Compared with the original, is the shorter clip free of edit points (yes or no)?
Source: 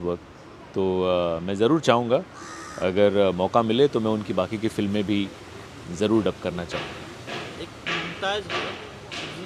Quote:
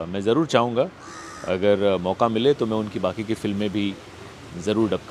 yes